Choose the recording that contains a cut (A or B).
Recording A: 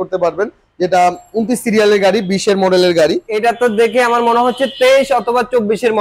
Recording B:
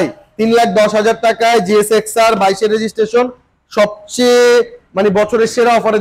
A